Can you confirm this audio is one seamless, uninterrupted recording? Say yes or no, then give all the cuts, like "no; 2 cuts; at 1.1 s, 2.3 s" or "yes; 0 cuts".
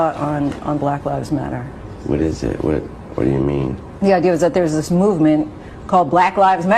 no; 1 cut; at 4.5 s